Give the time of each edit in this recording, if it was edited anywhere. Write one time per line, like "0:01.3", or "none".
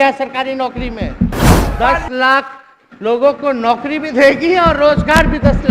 0:01.6